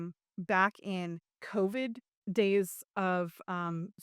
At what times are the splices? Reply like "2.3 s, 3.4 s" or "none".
2.1 s